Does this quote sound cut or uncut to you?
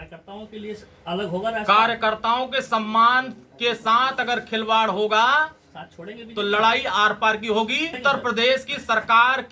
cut